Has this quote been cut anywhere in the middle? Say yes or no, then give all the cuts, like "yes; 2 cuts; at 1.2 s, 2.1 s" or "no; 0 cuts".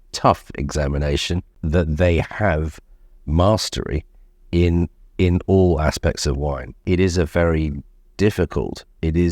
yes; 2 cuts; at 1.5 s, 6.8 s